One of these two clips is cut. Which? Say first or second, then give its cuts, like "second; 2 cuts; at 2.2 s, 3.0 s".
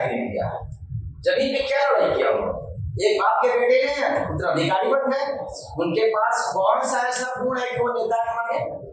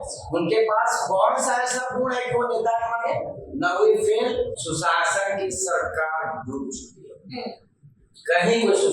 second; 1 cut; at 4.5 s